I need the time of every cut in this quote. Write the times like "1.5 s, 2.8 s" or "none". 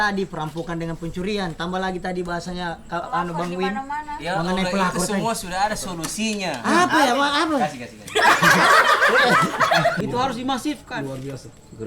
10.0 s